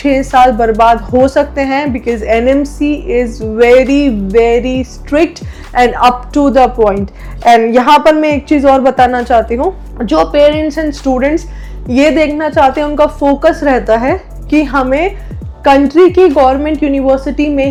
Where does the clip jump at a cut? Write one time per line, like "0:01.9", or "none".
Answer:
none

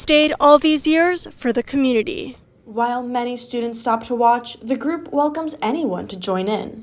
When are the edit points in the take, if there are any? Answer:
none

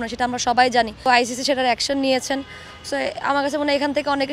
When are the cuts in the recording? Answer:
0:01.1

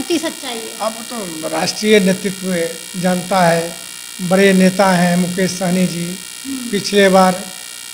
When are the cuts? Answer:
none

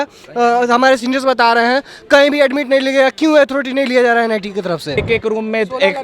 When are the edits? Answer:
0:05.0

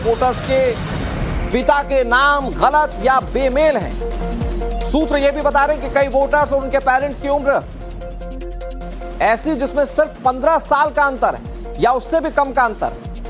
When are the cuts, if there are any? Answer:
0:12.2

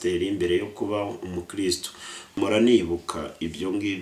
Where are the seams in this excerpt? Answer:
0:02.3

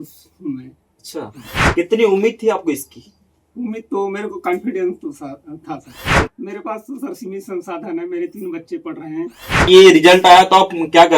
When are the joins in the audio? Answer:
0:06.3
0:09.7

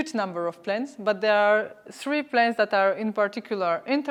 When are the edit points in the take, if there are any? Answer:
none

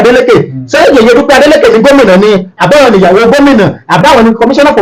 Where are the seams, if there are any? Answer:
none

